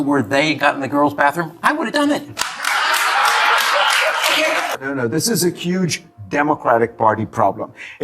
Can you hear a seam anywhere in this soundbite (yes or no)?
yes